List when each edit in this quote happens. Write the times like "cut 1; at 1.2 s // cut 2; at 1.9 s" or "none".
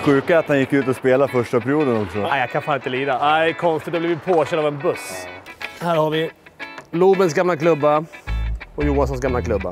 cut 1; at 2.2 s // cut 2; at 5.0 s

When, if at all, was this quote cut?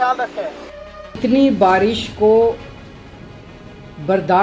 cut 1; at 1.2 s

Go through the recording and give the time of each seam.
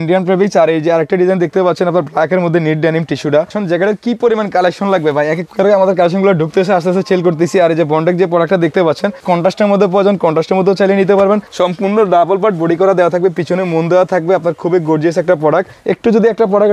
cut 1; at 3.6 s // cut 2; at 9.2 s // cut 3; at 11.5 s // cut 4; at 15.7 s

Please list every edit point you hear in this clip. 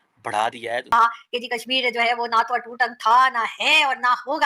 cut 1; at 0.9 s

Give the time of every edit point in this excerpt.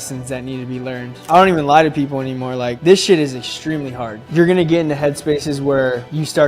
cut 1; at 1.1 s // cut 2; at 4.2 s

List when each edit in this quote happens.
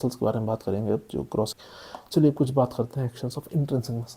cut 1; at 1.6 s

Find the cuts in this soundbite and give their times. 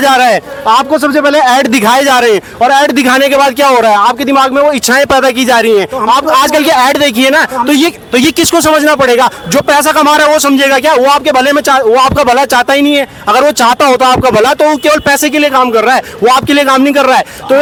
none

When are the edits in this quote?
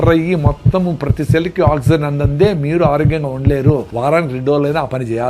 cut 1; at 3.9 s

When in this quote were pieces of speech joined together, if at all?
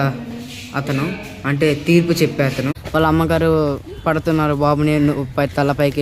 cut 1; at 2.8 s

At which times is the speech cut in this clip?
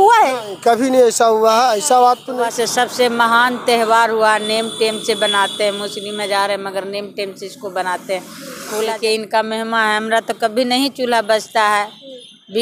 cut 1; at 2.4 s // cut 2; at 8.9 s

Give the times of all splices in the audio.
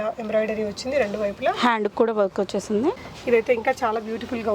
cut 1; at 3.1 s

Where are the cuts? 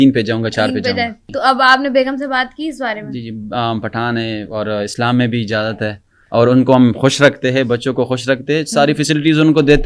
cut 1; at 1.3 s

